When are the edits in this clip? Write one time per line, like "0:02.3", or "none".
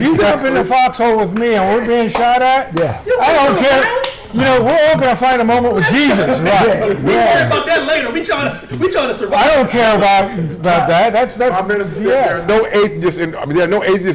none